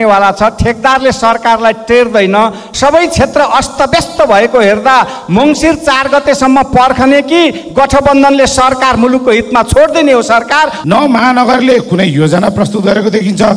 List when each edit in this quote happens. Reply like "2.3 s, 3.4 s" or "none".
2.7 s, 10.8 s